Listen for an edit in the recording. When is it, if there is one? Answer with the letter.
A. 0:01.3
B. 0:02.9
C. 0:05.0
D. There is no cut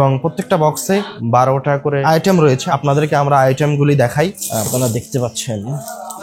D